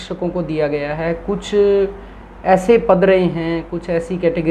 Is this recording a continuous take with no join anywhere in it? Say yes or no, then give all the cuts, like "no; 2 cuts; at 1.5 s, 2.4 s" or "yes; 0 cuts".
yes; 0 cuts